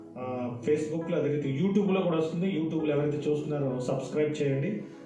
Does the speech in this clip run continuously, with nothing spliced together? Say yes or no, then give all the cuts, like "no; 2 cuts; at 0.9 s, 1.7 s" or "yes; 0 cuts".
yes; 0 cuts